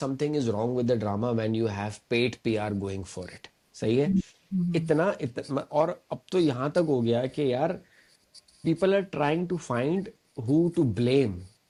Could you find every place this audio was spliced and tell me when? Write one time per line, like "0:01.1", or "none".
none